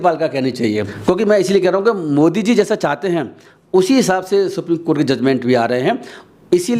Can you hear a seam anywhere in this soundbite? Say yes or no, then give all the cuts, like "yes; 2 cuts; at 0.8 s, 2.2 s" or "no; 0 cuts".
yes; 1 cut; at 0.9 s